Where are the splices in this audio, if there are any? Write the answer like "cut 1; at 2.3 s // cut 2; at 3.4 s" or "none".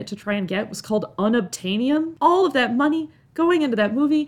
cut 1; at 2.1 s